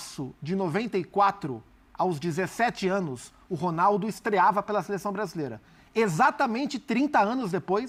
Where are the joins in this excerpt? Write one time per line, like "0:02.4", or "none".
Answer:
none